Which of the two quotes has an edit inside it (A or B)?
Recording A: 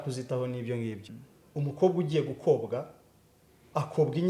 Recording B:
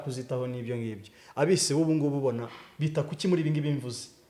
A